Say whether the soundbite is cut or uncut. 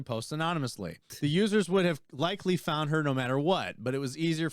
cut